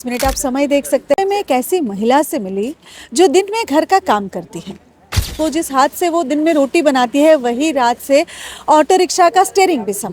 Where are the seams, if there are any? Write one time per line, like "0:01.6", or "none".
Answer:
0:01.2
0:05.3